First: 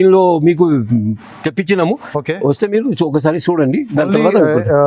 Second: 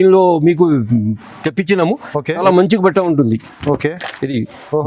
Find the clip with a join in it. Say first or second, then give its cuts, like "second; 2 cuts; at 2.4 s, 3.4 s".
second; 1 cut; at 2.4 s